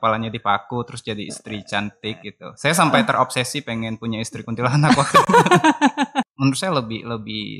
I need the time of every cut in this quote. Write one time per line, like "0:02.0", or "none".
0:06.2